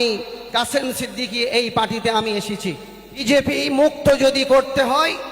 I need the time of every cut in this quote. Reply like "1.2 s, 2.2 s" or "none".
3.2 s